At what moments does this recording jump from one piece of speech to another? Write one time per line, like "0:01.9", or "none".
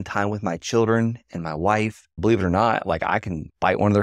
0:02.0